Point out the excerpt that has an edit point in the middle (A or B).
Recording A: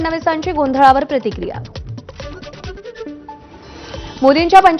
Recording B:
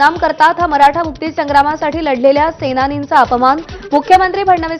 A